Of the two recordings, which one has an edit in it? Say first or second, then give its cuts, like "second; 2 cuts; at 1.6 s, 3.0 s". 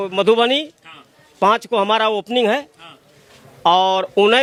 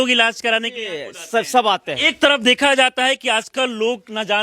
second; 1 cut; at 2.0 s